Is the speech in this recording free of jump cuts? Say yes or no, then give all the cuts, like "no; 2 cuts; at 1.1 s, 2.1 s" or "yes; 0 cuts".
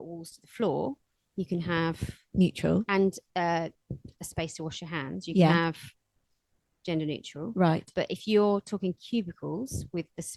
yes; 0 cuts